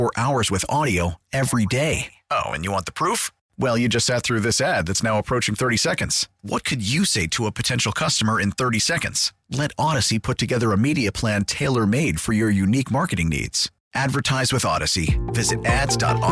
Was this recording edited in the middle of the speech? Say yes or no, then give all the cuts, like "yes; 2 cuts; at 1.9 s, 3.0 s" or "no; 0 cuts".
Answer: no; 0 cuts